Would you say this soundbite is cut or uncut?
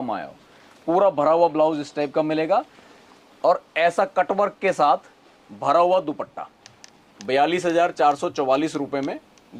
uncut